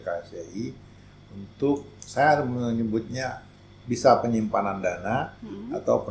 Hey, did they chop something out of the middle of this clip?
no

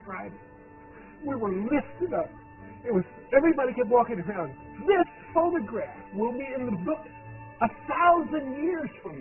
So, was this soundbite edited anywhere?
yes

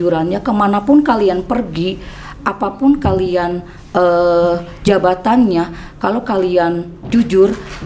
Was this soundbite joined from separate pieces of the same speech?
no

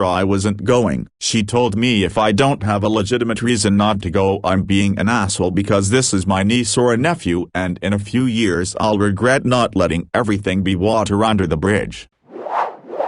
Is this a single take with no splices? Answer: no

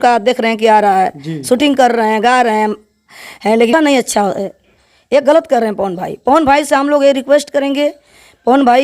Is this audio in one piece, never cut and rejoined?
no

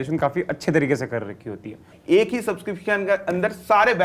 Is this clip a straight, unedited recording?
no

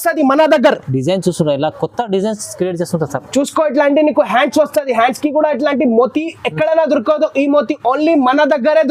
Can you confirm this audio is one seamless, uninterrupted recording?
yes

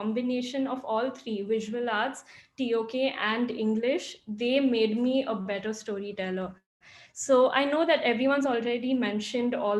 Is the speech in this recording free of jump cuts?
yes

